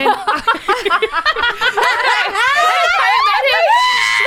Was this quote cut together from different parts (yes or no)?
no